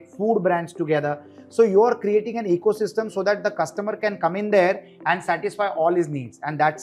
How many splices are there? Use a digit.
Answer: 0